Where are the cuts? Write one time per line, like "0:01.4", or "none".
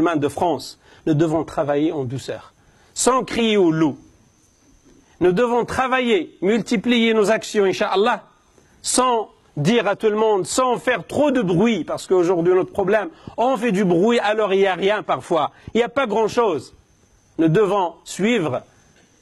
none